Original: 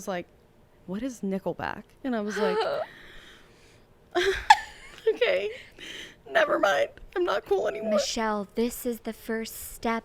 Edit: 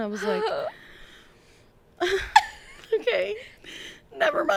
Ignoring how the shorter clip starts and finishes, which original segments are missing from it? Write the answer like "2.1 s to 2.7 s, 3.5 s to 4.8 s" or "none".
none